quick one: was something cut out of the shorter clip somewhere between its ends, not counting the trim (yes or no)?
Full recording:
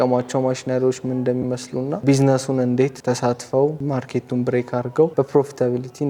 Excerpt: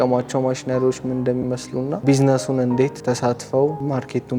no